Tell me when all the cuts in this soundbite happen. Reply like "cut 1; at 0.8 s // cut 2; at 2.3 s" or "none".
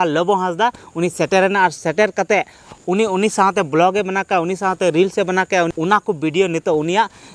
cut 1; at 5.7 s